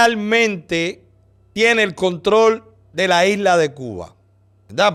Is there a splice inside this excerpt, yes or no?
no